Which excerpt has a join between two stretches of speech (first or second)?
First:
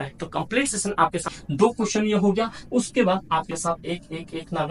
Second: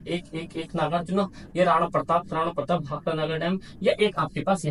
first